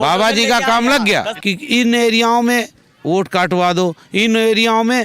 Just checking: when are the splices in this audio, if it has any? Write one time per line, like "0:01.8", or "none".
0:01.3